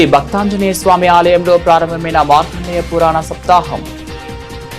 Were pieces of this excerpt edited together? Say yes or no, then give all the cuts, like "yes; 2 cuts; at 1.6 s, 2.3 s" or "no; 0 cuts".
yes; 1 cut; at 3.8 s